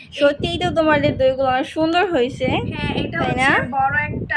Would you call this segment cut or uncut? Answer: uncut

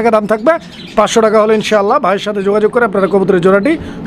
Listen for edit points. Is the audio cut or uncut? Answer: uncut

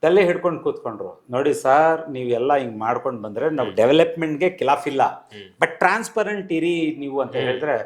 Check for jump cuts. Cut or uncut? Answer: uncut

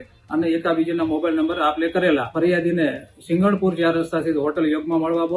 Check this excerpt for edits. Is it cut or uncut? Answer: cut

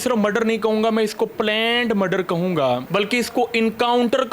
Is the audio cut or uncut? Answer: cut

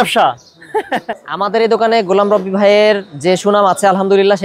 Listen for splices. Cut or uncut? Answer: cut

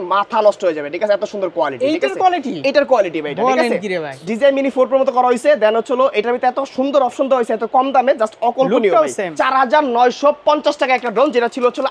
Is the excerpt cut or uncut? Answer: cut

